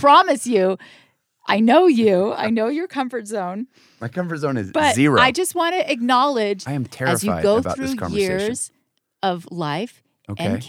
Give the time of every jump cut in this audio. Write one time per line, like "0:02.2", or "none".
0:06.6